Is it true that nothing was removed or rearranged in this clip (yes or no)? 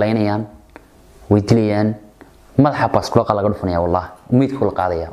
yes